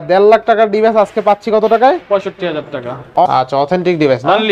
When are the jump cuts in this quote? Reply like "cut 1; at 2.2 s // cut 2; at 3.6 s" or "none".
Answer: cut 1; at 3.1 s